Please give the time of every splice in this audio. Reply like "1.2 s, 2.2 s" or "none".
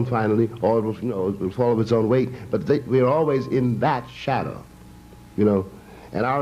2.4 s